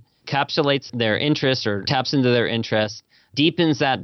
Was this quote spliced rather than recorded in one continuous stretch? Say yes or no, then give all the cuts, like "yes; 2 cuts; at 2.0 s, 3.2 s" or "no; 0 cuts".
yes; 2 cuts; at 0.9 s, 1.8 s